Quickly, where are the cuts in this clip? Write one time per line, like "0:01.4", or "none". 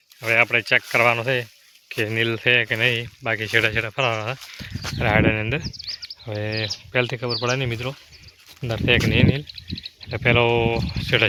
none